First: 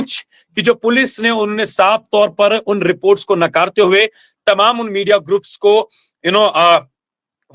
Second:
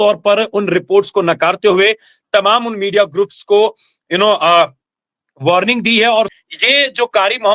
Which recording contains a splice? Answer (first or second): second